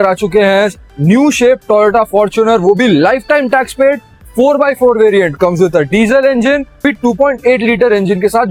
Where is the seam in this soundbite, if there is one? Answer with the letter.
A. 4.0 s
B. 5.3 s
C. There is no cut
C